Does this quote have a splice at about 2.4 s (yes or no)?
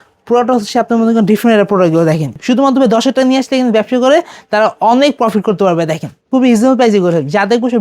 yes